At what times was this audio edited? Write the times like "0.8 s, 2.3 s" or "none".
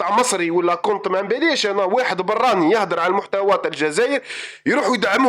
none